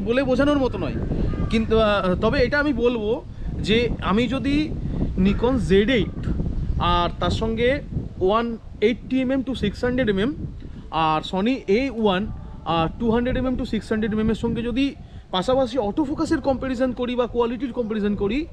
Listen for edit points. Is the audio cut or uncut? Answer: uncut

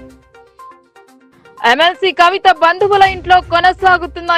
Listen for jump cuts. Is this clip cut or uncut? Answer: cut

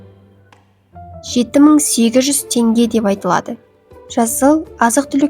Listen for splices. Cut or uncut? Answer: cut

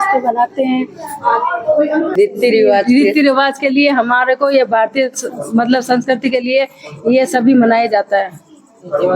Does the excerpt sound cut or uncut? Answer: cut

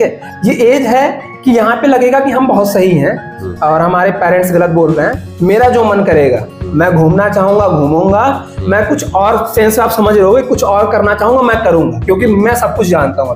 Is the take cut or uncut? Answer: uncut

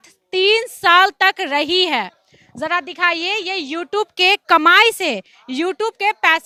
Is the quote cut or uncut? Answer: uncut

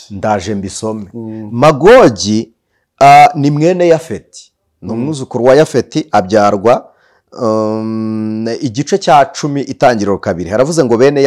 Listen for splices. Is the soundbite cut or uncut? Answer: uncut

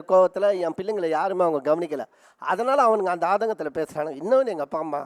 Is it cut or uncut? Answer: uncut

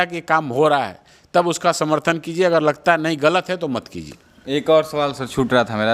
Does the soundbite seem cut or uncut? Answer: uncut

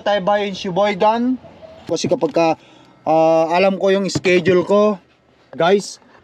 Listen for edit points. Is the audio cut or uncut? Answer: cut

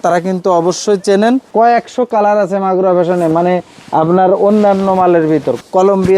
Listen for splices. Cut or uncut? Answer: cut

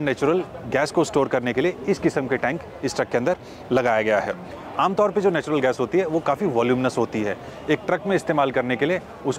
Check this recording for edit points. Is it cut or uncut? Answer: uncut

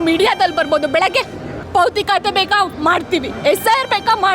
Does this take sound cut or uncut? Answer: cut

